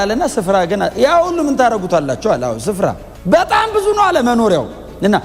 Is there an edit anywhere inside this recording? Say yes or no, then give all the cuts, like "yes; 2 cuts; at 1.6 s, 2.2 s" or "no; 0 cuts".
yes; 1 cut; at 3.1 s